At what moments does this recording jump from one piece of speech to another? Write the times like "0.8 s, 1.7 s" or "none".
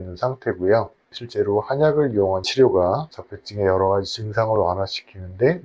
1.1 s